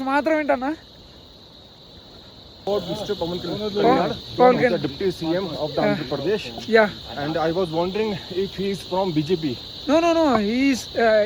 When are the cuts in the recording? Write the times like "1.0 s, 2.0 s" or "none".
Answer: 2.6 s